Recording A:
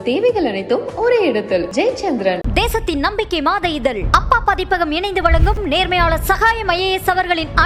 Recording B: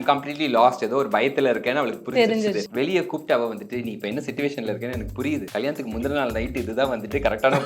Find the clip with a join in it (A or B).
B